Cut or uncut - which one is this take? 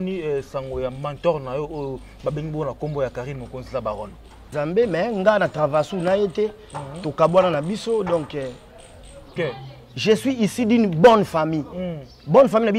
cut